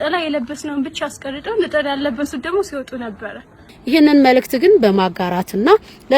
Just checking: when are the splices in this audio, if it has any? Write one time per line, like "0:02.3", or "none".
0:03.7